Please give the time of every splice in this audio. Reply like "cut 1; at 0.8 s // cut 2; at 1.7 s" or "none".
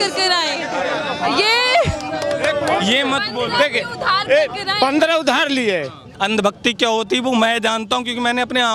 cut 1; at 6.1 s